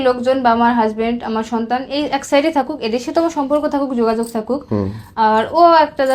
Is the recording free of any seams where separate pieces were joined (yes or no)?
yes